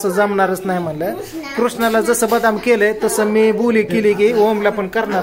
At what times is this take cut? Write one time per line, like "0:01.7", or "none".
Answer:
none